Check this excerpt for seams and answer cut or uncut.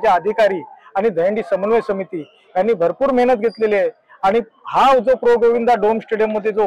uncut